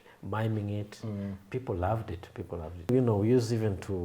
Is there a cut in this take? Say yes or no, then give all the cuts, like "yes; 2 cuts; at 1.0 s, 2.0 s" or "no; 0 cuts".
yes; 1 cut; at 2.9 s